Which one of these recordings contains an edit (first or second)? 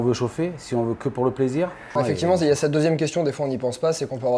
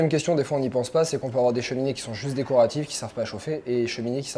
first